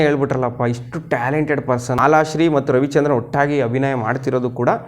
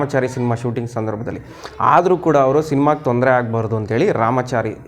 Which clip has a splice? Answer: first; 1 cut; at 2.0 s

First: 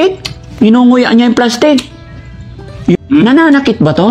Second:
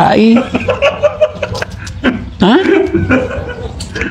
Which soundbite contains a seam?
first; 1 cut; at 3.0 s

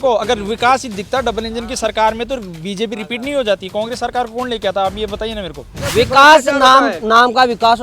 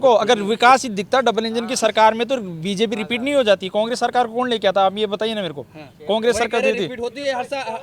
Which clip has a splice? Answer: first; 1 cut; at 5.9 s

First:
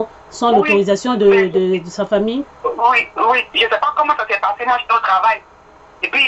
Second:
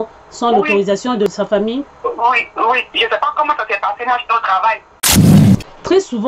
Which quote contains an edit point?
second; 2 cuts; at 1.3 s, 4.9 s

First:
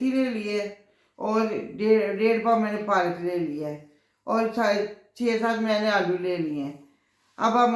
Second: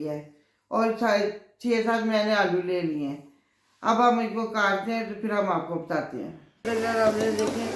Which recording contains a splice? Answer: second; 1 cut; at 6.5 s

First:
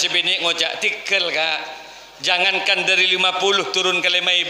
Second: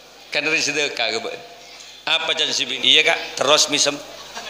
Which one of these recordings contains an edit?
second; 1 cut; at 2.8 s

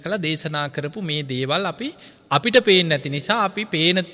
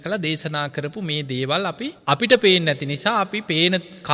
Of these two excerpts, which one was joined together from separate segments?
second; 1 cut; at 2.0 s

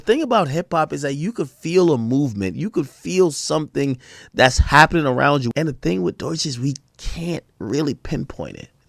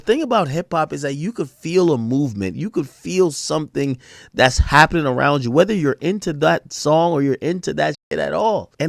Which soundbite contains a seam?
first; 1 cut; at 5.5 s

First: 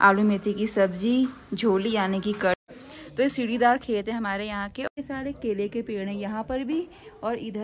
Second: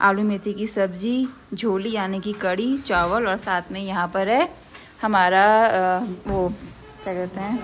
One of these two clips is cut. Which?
first; 2 cuts; at 2.6 s, 4.9 s

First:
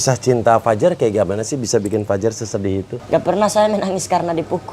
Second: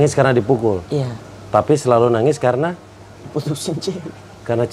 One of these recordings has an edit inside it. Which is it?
first; 1 cut; at 2.9 s

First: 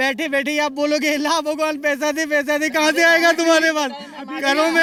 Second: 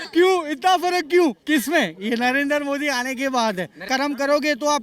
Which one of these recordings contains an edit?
second; 1 cut; at 3.8 s

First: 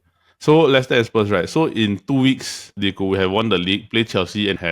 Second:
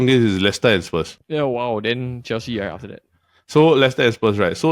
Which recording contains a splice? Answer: second; 1 cut; at 1.2 s

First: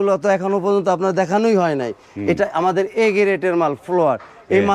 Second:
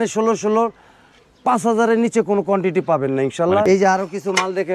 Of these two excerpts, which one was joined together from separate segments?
second; 1 cut; at 3.6 s

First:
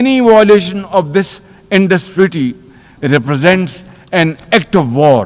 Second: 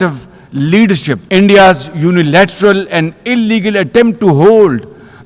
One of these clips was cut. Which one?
second; 1 cut; at 1.2 s

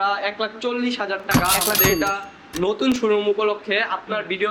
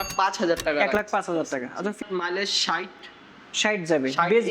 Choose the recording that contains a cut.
second; 1 cut; at 2.0 s

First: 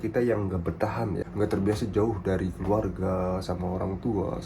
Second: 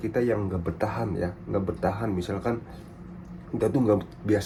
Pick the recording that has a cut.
first; 1 cut; at 1.2 s

